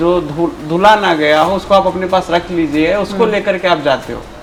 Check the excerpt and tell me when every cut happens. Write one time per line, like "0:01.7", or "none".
none

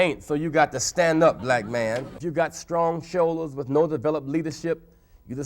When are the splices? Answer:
0:02.1

